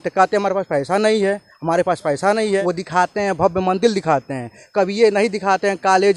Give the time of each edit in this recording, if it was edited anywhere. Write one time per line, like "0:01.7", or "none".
0:02.6

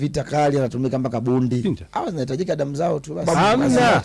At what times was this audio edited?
0:01.6
0:03.2

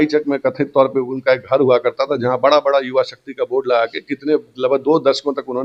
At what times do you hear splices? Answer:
none

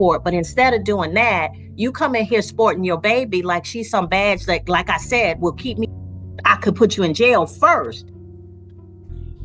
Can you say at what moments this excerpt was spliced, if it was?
0:05.9

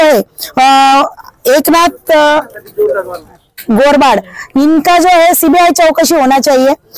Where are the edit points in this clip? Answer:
none

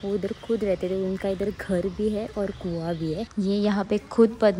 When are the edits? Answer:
0:03.3

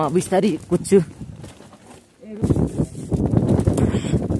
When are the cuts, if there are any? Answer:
0:02.4

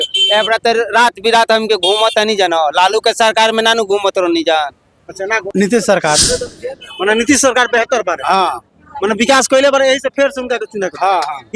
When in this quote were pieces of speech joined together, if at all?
0:05.4

